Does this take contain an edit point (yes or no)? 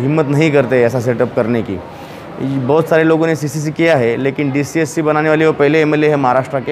no